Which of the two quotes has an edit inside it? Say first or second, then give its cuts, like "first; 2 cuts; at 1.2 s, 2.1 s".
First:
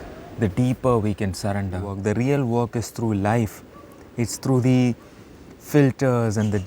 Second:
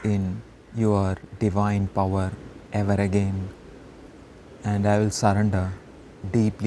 first; 1 cut; at 1.9 s